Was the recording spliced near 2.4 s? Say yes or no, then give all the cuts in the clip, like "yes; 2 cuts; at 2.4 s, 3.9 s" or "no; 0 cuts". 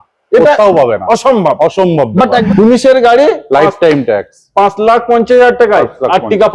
yes; 1 cut; at 2.4 s